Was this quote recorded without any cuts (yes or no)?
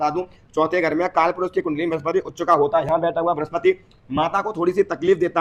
yes